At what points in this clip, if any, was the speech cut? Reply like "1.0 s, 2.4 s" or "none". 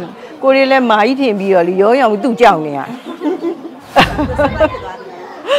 3.7 s